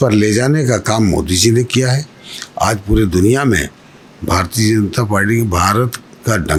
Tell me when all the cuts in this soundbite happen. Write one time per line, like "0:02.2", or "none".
none